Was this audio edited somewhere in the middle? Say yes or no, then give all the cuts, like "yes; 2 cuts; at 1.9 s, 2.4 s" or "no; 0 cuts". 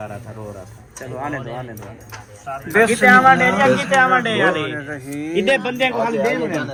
no; 0 cuts